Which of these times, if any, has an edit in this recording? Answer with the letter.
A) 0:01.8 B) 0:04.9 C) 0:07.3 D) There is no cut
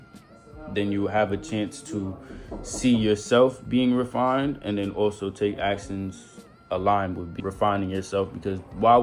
C